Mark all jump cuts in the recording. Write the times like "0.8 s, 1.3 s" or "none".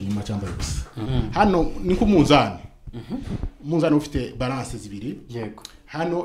1.1 s